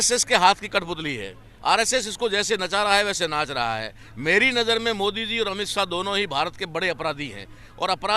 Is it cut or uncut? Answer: uncut